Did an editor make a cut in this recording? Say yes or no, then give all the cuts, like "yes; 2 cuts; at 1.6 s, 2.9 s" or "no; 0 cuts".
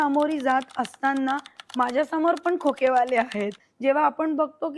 yes; 1 cut; at 3.6 s